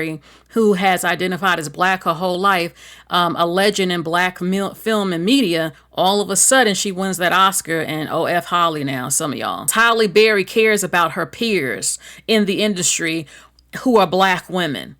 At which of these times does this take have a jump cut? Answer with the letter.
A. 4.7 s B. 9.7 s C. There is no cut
B